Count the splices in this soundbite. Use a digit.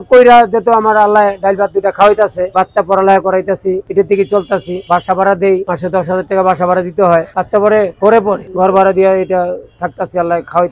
0